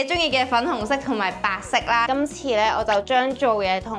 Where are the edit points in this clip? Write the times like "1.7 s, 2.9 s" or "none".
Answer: 2.1 s